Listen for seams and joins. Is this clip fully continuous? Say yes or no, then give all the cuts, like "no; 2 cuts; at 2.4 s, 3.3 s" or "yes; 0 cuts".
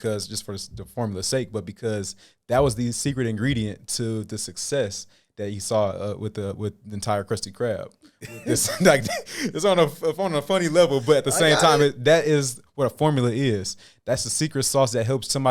yes; 0 cuts